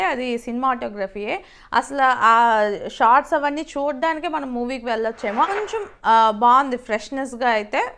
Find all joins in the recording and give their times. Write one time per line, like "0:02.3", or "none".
0:05.5